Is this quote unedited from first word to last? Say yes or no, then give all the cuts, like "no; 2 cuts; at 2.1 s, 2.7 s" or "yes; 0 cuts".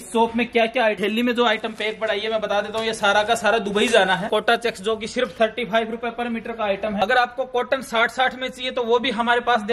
no; 3 cuts; at 1.0 s, 4.3 s, 7.0 s